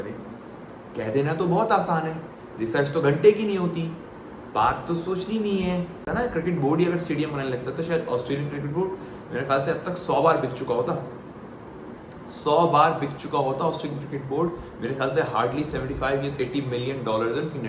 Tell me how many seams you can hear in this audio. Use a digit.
1